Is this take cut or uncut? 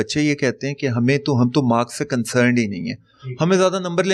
uncut